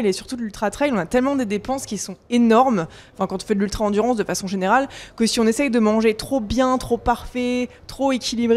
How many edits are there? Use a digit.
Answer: 0